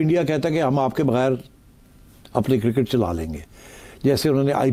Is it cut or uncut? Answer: uncut